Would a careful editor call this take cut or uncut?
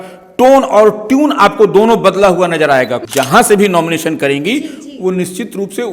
cut